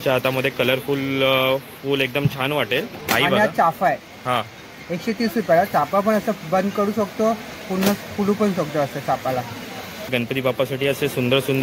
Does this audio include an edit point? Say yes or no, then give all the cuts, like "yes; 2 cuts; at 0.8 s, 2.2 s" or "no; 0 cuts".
yes; 2 cuts; at 3.0 s, 10.1 s